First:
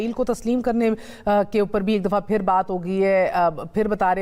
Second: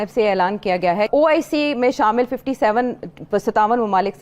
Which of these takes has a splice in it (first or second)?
second